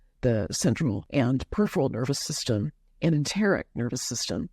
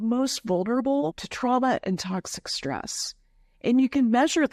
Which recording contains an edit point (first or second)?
first